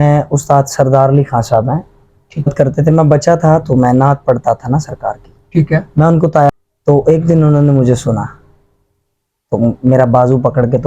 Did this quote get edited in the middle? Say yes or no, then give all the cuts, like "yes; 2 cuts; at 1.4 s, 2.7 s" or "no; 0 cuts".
yes; 2 cuts; at 2.5 s, 6.5 s